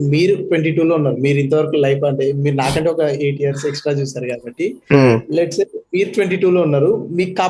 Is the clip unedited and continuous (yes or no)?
yes